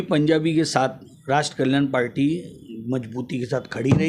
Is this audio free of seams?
yes; 0 cuts

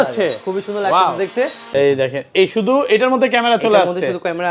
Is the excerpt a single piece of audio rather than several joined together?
no; 1 cut; at 1.6 s

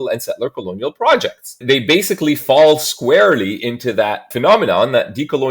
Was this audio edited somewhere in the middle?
yes; 2 cuts; at 1.5 s, 4.3 s

